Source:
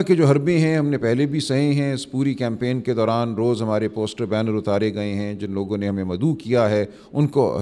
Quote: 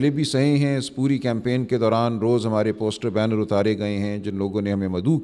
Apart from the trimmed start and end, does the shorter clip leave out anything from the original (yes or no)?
no